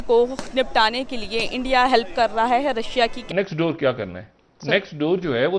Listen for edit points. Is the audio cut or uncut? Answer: cut